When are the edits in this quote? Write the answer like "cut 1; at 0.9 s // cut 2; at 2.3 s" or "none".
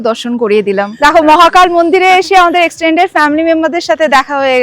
cut 1; at 0.9 s

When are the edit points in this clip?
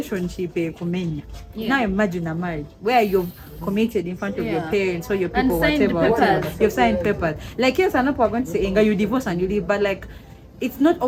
none

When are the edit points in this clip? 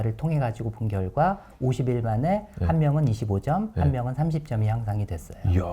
none

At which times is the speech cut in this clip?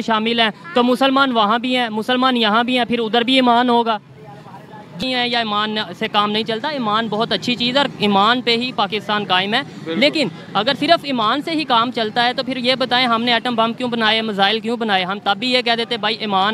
cut 1; at 5.0 s

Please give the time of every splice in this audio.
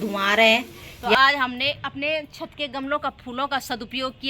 cut 1; at 1.1 s

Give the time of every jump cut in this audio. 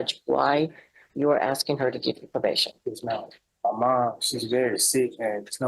cut 1; at 3.4 s

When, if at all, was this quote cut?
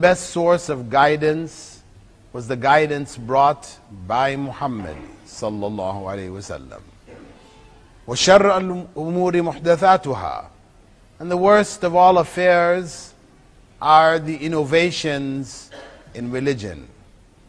none

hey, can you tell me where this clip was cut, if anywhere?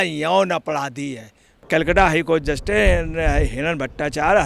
cut 1; at 1.5 s

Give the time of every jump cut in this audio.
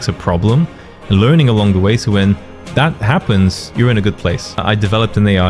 cut 1; at 4.6 s

